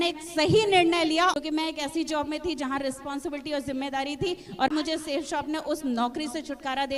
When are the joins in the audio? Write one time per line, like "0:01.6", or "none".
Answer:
0:01.4
0:04.7